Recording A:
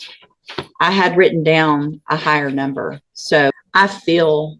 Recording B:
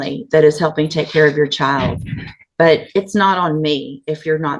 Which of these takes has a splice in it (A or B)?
A